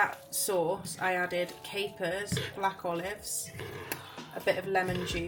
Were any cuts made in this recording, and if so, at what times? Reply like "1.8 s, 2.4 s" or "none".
none